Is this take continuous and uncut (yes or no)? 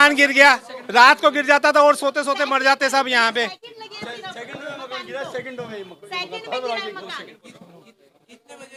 yes